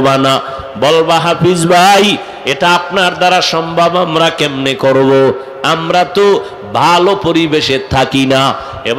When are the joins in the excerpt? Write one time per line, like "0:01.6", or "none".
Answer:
none